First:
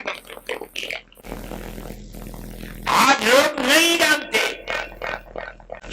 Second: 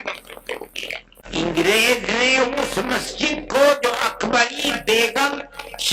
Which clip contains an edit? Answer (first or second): second